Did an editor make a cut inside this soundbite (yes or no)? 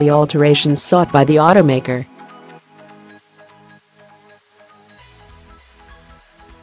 yes